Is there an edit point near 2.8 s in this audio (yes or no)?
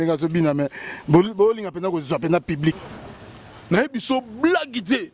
yes